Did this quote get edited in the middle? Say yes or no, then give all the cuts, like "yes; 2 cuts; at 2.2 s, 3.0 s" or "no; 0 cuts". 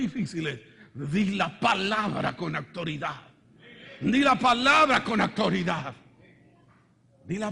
yes; 1 cut; at 3.7 s